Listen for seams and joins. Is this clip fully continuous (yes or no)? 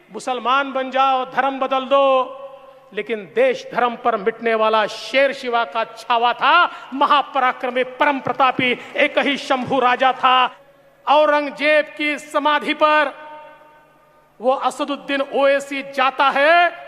no